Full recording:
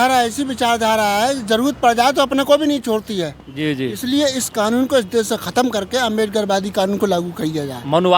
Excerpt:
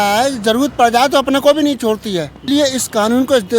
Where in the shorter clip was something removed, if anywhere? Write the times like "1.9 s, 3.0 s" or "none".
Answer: 2.4 s